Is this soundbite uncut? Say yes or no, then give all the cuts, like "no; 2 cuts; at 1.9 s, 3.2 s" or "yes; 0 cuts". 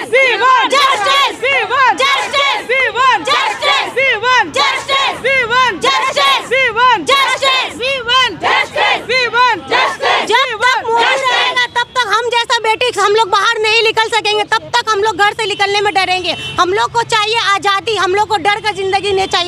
yes; 0 cuts